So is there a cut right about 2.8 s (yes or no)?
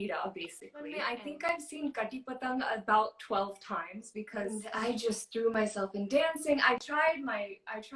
no